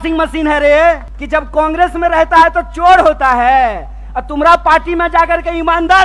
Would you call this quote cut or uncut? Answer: cut